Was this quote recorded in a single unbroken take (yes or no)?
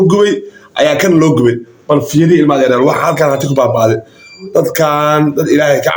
yes